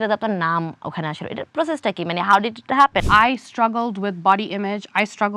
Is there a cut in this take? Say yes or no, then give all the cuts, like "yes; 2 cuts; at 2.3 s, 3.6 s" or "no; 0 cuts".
yes; 1 cut; at 3.1 s